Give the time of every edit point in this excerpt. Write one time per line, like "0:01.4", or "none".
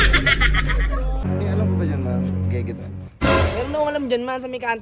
0:01.3